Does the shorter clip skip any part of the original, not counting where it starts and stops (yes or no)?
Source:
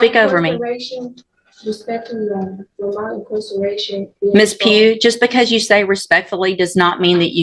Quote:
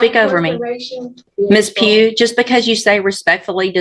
yes